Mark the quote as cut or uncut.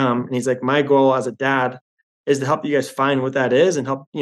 uncut